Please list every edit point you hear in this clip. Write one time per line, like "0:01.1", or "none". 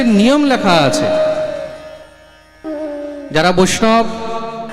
0:02.6